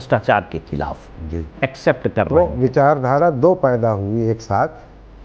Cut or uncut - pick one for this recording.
cut